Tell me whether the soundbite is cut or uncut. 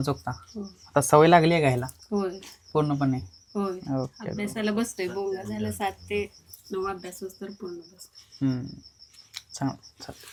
uncut